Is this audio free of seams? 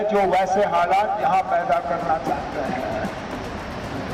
yes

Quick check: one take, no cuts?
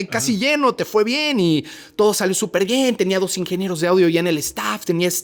yes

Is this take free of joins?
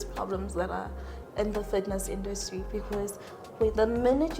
yes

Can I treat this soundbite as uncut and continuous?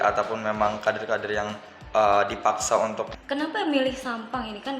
no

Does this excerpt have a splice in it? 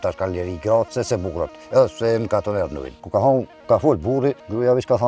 no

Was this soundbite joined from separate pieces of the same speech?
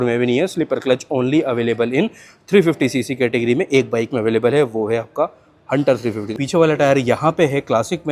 yes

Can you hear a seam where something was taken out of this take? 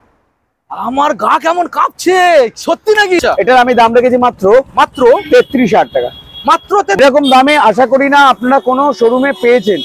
yes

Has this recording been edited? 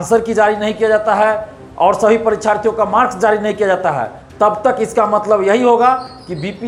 no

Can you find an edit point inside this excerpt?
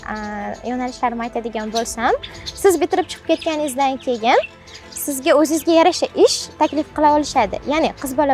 no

